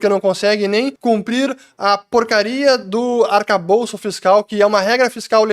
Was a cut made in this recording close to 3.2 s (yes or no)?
no